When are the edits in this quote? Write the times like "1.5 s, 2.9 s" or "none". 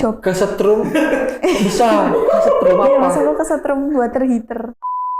none